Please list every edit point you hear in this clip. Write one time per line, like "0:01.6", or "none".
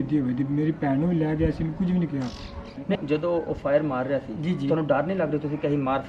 0:02.9